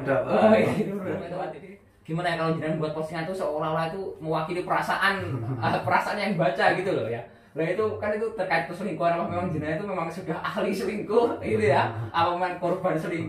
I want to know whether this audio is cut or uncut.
cut